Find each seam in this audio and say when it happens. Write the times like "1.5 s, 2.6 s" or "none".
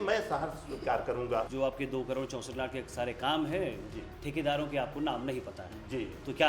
1.5 s